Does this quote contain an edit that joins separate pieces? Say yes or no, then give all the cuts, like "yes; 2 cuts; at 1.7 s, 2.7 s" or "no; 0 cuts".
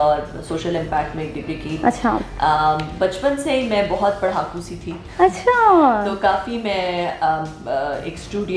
no; 0 cuts